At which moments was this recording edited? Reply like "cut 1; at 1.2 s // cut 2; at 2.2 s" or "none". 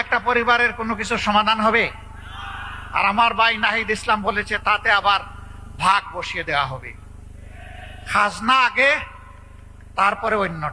none